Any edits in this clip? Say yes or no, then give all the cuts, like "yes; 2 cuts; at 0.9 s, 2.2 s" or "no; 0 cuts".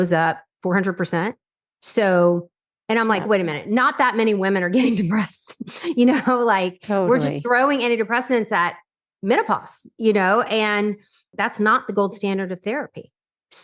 yes; 1 cut; at 11.3 s